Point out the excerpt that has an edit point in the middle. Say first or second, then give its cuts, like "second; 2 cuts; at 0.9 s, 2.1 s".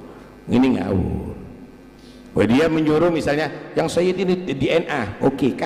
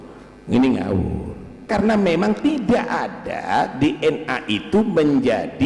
second; 1 cut; at 1.7 s